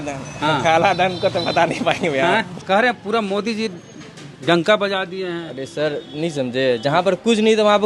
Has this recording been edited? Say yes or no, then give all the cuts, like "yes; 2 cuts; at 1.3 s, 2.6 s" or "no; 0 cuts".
yes; 1 cut; at 2.6 s